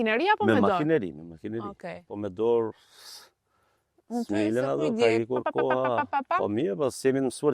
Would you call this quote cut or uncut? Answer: uncut